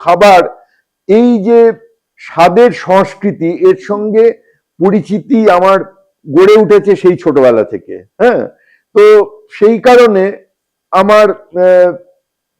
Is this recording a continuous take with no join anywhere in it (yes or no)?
yes